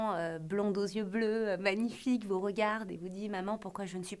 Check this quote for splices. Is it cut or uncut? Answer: uncut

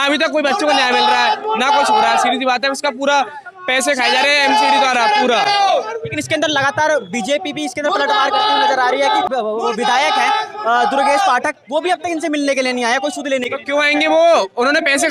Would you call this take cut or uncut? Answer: uncut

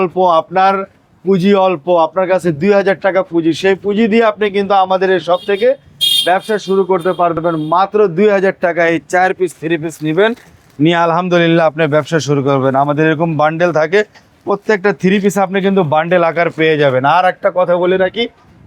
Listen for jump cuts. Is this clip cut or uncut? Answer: uncut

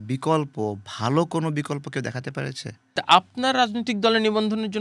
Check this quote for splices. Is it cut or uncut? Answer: cut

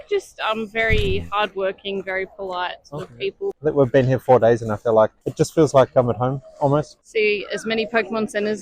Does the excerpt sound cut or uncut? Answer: cut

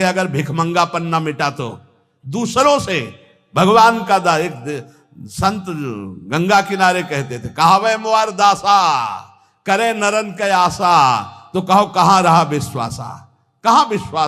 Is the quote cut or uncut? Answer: uncut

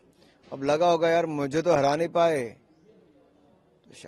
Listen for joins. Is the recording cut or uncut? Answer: uncut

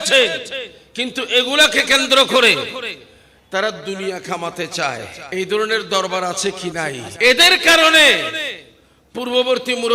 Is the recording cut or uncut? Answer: cut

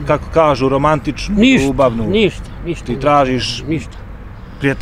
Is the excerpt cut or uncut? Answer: uncut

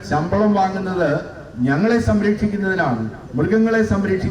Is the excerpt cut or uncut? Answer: uncut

